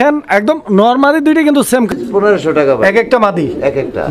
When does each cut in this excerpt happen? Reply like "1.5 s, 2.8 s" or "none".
1.9 s